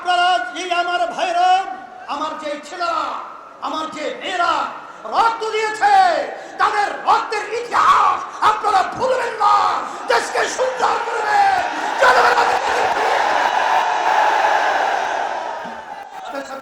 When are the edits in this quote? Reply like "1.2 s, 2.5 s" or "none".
none